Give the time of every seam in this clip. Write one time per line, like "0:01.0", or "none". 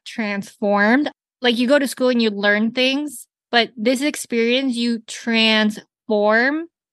0:01.1